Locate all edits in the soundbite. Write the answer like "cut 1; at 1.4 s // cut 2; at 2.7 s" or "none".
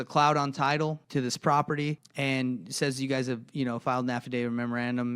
cut 1; at 1.0 s // cut 2; at 2.1 s